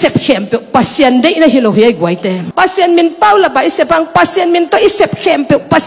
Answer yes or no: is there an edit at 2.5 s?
yes